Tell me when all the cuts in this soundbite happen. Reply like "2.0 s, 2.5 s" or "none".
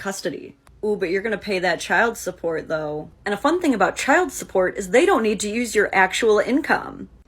5.9 s